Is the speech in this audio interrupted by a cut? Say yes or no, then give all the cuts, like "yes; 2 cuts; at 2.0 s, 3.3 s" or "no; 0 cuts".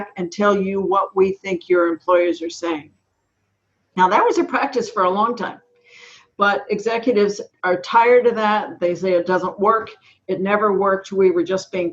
yes; 1 cut; at 7.5 s